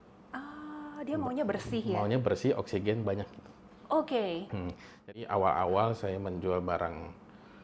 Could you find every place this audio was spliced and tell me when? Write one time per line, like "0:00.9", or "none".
0:05.0